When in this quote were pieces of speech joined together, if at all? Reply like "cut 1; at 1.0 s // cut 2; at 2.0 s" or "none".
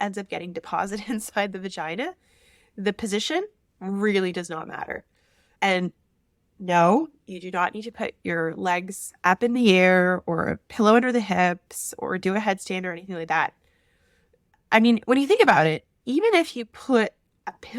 none